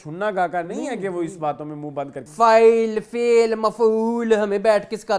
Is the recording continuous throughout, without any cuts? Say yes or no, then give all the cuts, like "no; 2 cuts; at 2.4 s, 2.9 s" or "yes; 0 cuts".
no; 1 cut; at 2.3 s